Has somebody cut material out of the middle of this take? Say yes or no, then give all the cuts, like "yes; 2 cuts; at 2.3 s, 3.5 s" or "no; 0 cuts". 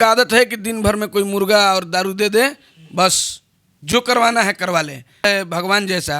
yes; 1 cut; at 5.2 s